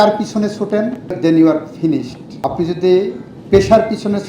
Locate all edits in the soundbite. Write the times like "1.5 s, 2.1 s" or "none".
1.2 s, 2.2 s